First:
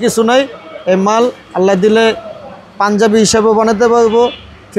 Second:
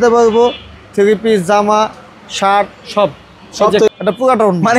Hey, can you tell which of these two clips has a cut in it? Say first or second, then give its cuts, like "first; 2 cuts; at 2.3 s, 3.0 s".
second; 1 cut; at 3.9 s